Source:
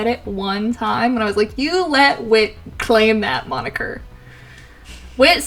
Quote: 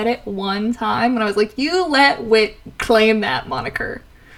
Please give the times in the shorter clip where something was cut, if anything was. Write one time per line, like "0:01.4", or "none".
none